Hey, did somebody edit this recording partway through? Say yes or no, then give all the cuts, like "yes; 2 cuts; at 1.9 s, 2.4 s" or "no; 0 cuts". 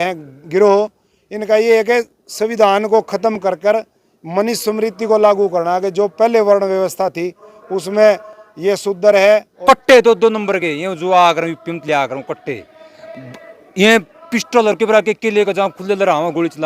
yes; 1 cut; at 9.5 s